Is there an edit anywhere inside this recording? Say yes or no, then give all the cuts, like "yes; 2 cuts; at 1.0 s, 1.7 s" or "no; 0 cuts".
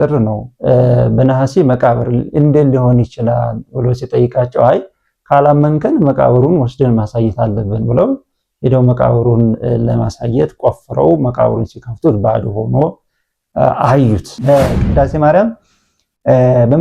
yes; 1 cut; at 14.3 s